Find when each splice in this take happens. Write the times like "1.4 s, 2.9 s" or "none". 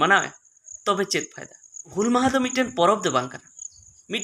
1.9 s